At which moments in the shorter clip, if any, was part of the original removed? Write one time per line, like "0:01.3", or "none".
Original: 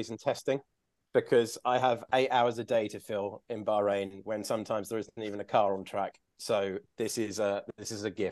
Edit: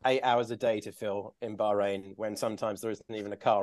none

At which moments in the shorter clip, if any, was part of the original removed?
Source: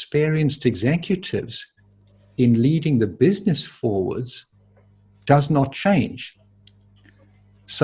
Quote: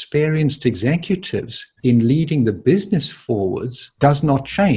0:01.6
0:03.8

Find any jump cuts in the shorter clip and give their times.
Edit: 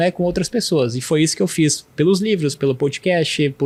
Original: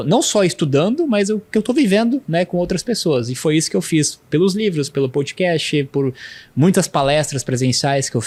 none

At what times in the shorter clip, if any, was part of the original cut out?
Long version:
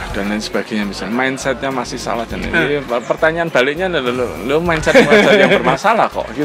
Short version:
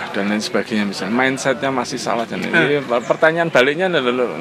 none

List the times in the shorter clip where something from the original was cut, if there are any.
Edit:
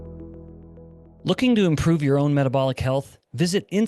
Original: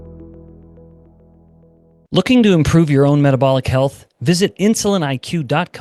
0:01.1

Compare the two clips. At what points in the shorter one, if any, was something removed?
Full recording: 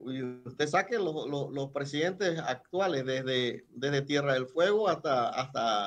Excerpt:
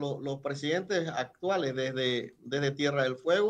none

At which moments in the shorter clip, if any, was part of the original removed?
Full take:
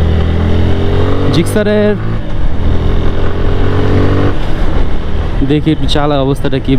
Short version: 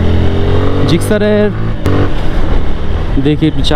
0:01.9

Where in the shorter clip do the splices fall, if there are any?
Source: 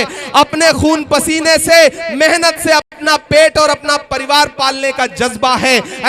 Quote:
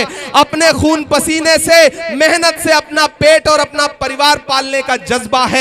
0:02.9

